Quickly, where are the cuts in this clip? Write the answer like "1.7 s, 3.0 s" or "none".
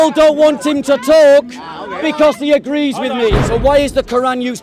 3.4 s